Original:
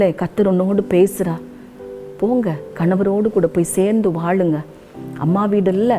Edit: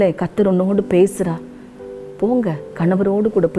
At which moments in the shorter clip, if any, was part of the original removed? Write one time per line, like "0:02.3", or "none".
none

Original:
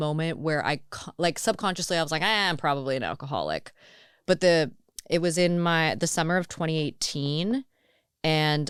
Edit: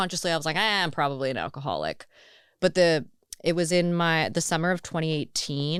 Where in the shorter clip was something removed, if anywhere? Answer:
none

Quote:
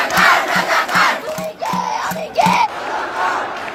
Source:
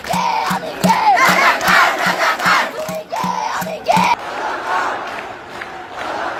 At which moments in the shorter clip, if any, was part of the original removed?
none

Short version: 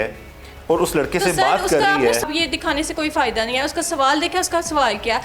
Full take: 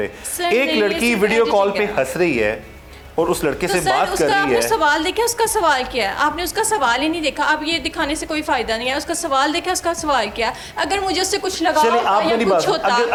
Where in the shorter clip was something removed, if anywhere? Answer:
0:02.2

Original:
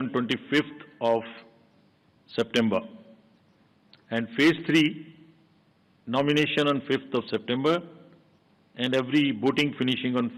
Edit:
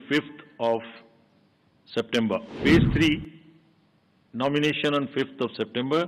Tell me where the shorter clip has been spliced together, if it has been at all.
0:02.6

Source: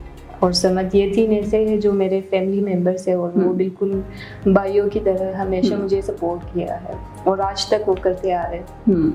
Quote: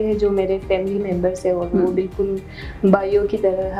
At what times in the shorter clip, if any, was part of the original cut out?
none

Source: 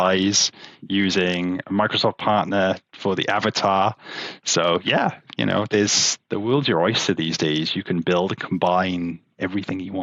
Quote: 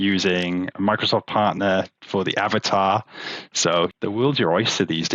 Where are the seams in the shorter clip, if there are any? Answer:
0:03.9

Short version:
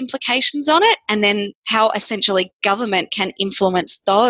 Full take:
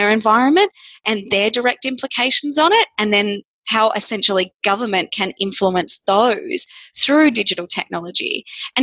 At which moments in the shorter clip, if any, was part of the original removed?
0:01.6

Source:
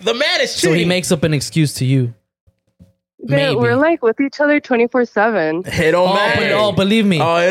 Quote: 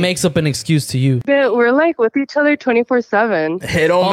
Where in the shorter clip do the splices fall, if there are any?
0:01.2

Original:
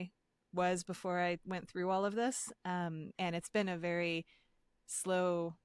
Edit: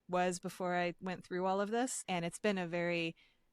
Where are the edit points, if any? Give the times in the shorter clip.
0:02.0

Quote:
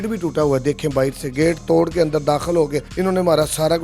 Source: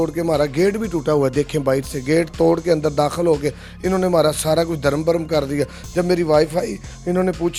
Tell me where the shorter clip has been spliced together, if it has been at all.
0:02.8

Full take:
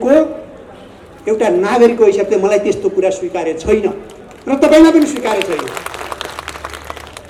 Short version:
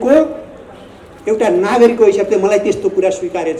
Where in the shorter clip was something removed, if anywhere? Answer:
none

